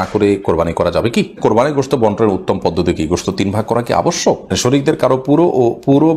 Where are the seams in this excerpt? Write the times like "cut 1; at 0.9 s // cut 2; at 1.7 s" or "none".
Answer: cut 1; at 1.4 s // cut 2; at 4.5 s